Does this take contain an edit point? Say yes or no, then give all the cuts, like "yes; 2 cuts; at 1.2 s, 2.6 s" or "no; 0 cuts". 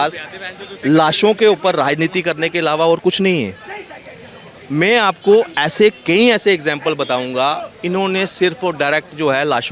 no; 0 cuts